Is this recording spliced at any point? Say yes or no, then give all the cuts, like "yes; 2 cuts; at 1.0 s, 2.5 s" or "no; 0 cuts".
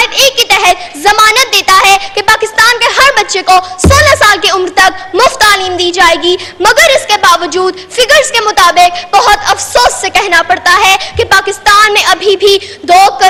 no; 0 cuts